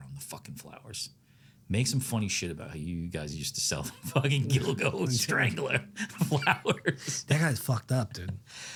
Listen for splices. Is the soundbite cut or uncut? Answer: uncut